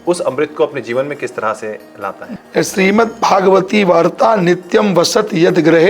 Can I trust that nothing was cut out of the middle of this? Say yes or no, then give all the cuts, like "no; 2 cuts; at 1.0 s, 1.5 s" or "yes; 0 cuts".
no; 1 cut; at 2.3 s